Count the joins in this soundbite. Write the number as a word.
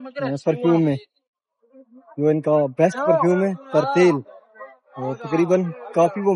zero